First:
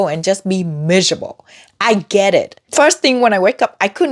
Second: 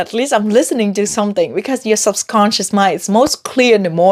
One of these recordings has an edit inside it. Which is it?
first; 1 cut; at 2.6 s

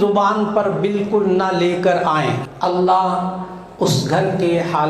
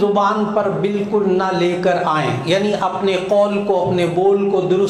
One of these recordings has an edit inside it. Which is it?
first; 1 cut; at 2.4 s

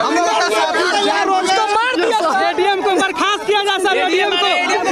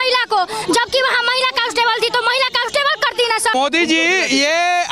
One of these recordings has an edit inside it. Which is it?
second; 1 cut; at 3.5 s

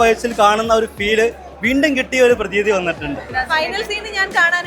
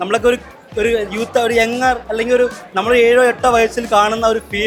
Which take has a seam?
first; 1 cut; at 3.3 s

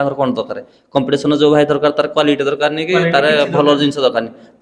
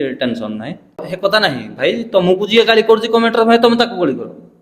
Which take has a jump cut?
second; 1 cut; at 1.1 s

